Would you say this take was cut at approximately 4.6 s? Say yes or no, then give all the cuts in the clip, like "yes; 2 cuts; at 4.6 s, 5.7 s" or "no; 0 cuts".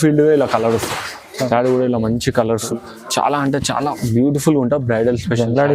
no; 1 cut; at 2.7 s